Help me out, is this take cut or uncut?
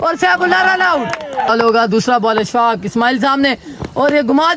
cut